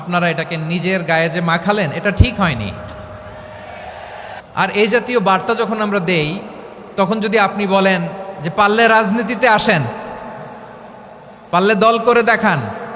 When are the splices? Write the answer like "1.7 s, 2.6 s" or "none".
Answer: 4.3 s